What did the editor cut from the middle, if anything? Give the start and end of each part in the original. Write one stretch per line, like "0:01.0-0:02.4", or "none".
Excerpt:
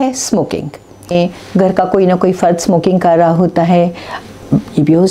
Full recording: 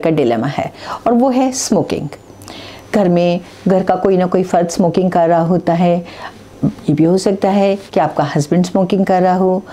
0:02.5-0:03.2